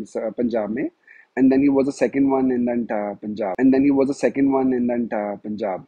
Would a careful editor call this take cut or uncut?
uncut